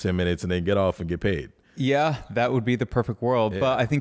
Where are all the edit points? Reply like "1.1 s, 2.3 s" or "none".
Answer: none